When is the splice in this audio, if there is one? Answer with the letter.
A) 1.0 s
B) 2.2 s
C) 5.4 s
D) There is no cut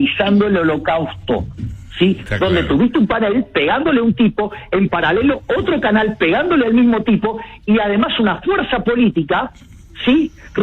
B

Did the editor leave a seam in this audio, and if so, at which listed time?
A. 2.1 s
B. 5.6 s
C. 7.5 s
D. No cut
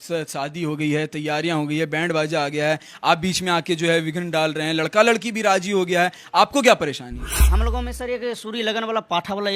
C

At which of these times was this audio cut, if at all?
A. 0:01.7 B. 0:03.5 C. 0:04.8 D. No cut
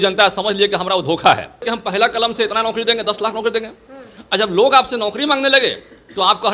A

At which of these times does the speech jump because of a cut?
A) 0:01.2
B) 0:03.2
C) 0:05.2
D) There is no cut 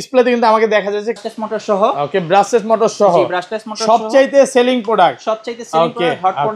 A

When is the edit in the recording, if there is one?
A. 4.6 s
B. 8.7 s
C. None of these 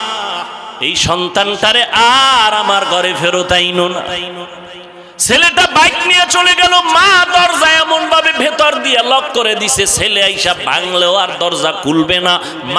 A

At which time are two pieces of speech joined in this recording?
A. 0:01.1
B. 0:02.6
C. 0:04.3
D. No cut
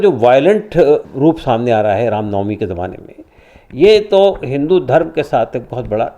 A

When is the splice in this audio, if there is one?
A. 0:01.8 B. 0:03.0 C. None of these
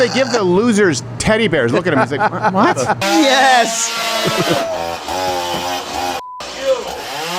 B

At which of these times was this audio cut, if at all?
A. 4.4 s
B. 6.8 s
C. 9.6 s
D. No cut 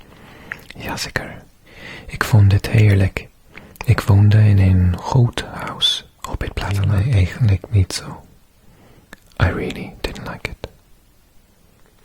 B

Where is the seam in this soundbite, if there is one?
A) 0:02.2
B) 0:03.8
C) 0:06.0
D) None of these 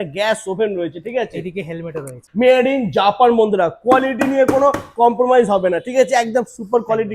A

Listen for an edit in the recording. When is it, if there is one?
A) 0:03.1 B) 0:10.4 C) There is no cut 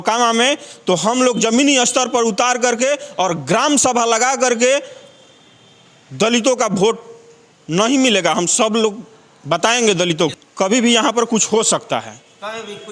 B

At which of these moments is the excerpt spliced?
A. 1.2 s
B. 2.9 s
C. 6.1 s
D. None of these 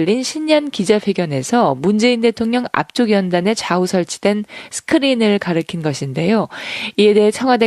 A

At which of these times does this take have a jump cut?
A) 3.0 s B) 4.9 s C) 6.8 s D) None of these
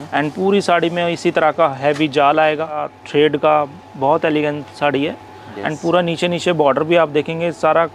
A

